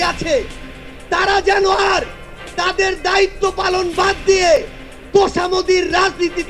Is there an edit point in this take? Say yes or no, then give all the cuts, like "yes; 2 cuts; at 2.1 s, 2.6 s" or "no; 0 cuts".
no; 0 cuts